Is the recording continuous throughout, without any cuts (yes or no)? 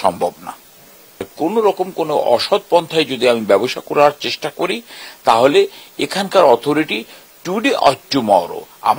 no